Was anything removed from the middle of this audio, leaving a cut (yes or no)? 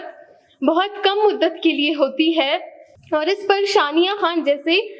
no